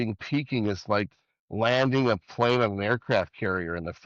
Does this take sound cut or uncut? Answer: uncut